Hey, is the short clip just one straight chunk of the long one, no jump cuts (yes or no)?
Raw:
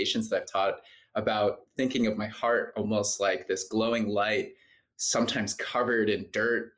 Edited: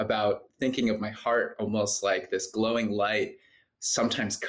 yes